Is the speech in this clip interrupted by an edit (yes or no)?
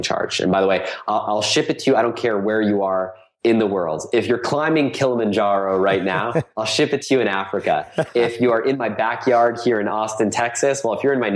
no